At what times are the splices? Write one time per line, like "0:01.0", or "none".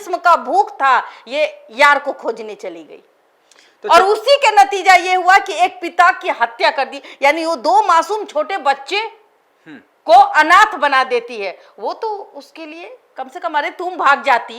none

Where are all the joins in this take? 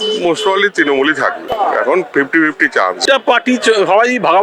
0:01.5
0:03.0

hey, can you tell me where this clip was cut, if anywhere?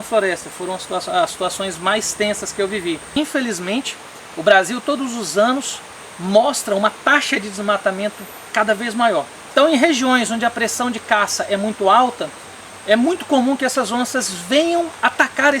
0:03.2
0:09.4

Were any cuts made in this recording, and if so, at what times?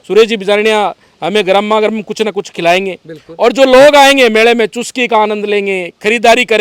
none

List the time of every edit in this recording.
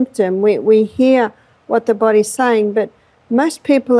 none

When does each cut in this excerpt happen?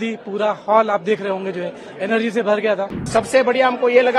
0:03.1

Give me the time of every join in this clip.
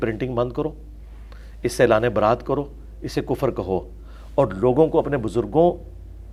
none

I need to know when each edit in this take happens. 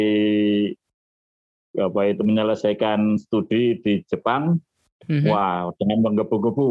none

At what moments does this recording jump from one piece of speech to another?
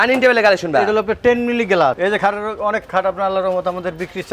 0:02.0

